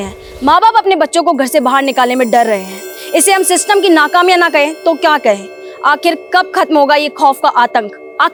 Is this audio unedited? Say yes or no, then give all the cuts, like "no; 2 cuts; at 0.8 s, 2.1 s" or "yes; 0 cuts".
yes; 0 cuts